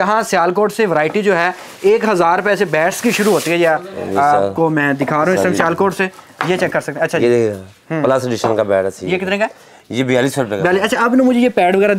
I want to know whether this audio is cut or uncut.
uncut